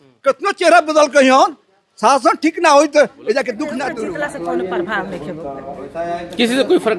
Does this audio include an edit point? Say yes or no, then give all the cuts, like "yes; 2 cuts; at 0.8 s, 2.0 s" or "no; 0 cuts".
yes; 1 cut; at 3.8 s